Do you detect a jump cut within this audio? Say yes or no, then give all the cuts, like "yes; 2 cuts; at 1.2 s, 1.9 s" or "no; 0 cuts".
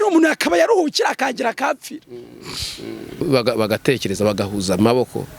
yes; 1 cut; at 3.2 s